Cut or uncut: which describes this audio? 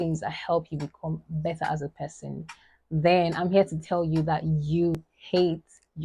cut